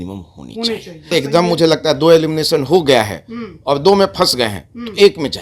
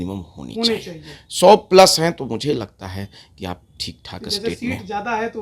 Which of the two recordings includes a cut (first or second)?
first